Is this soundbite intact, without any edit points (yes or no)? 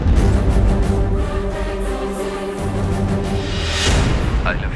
no